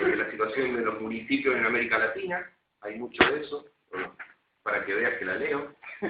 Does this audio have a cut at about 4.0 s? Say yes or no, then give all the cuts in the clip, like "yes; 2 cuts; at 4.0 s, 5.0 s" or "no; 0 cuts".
no; 1 cut; at 1.9 s